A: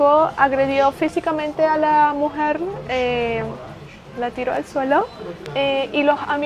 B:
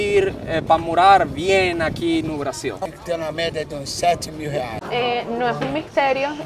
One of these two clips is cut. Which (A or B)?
B